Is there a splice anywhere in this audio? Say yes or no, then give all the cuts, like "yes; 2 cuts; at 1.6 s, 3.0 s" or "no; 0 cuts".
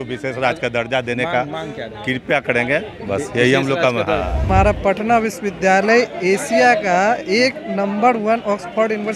yes; 1 cut; at 4.5 s